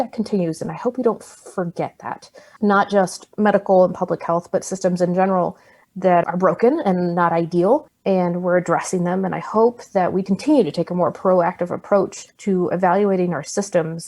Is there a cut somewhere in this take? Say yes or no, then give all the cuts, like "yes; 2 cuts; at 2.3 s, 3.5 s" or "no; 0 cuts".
yes; 1 cut; at 2.5 s